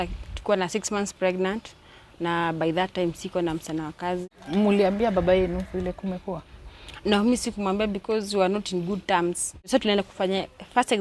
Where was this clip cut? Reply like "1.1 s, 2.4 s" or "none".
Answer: 4.3 s, 9.5 s